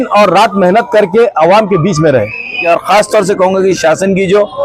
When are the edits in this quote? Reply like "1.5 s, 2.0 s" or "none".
2.6 s